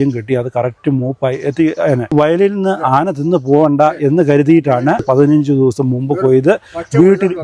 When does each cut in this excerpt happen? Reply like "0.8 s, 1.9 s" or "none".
2.1 s, 5.0 s

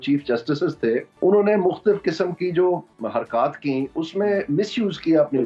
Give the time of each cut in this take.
1.1 s, 2.9 s

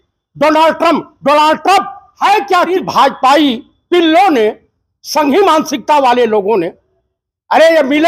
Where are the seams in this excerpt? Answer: 2.7 s

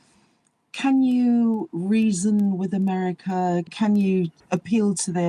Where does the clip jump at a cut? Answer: 3.7 s, 4.4 s

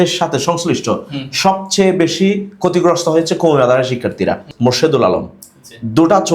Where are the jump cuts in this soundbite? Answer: 4.5 s

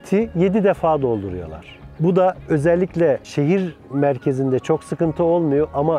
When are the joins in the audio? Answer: 3.3 s

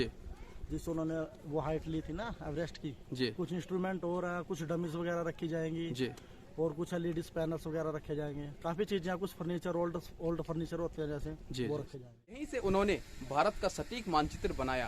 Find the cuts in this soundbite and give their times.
12.4 s

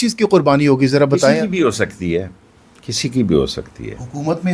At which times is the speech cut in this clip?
none

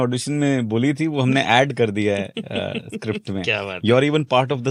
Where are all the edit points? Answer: none

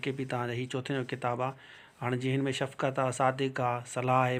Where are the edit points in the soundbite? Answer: none

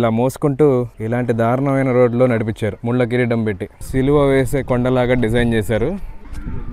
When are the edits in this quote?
1.0 s, 2.8 s, 3.7 s

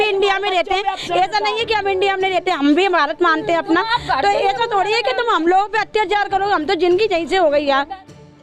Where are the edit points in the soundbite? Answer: none

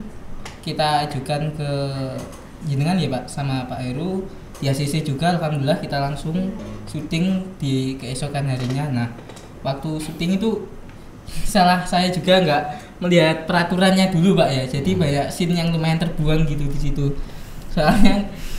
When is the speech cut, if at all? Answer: 6.6 s

